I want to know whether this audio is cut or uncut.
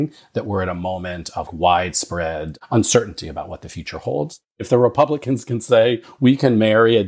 cut